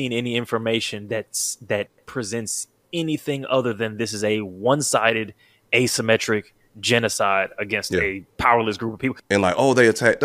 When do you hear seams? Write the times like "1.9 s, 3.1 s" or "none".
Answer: 2.8 s, 8.2 s, 9.2 s